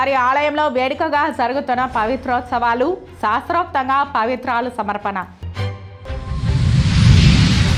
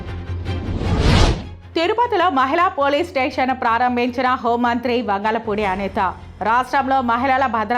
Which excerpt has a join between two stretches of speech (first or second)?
second